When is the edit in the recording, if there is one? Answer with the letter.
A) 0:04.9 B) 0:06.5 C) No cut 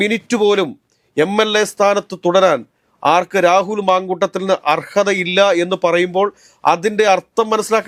C